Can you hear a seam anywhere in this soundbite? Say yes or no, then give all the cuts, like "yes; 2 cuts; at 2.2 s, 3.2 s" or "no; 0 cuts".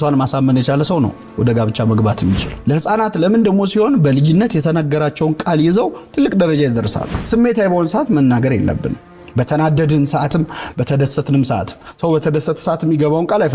yes; 2 cuts; at 2.5 s, 7.2 s